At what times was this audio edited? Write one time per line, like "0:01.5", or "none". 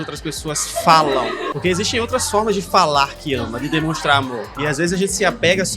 0:01.4
0:04.5